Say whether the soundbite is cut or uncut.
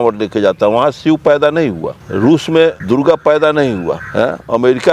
cut